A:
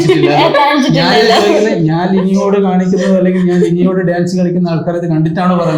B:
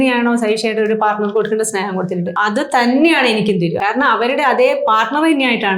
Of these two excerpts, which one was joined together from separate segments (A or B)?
B